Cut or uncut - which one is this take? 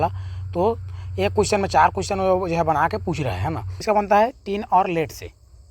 cut